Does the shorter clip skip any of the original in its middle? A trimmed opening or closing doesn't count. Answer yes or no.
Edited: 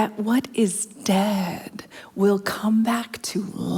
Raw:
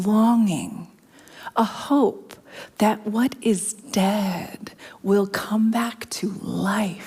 no